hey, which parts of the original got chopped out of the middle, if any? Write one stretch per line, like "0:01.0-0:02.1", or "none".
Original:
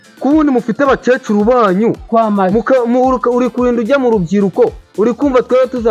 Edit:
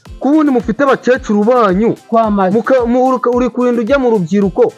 none